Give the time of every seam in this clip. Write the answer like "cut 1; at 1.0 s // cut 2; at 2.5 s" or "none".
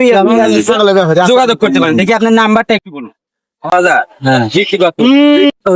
cut 1; at 3.7 s